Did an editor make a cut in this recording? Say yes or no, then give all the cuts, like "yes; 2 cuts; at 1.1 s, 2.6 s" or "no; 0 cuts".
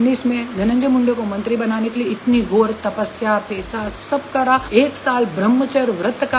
yes; 1 cut; at 4.7 s